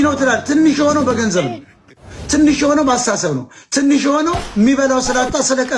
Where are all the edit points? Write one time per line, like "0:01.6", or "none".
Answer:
none